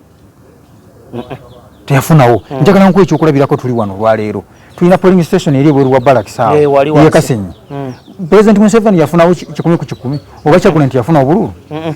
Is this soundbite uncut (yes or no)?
yes